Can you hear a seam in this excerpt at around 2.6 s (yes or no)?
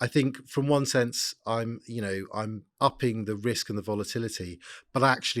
yes